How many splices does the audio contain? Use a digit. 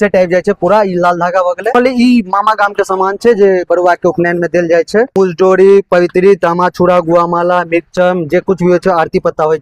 2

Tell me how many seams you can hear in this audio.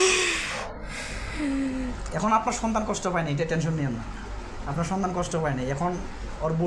0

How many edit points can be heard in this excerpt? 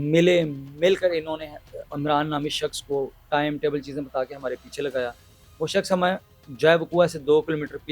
0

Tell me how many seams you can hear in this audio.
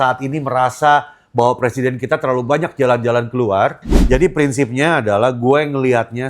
1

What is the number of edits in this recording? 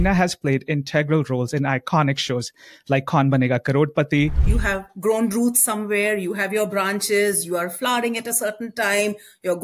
1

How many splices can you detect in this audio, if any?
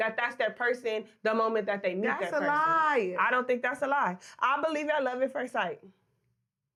0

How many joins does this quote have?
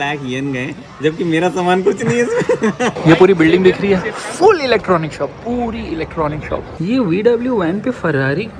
2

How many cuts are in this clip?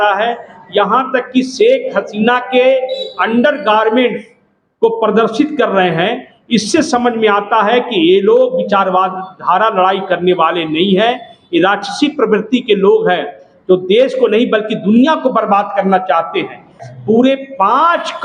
1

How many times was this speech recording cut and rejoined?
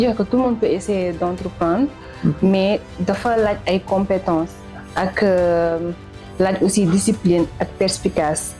0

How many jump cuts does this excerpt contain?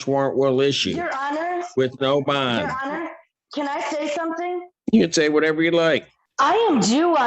0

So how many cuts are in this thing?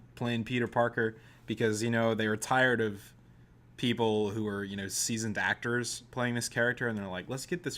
1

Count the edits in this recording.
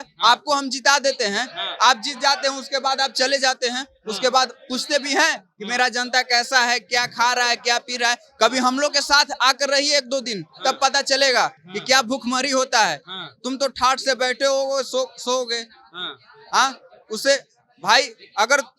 0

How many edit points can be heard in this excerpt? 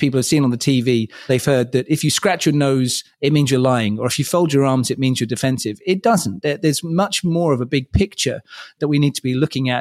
1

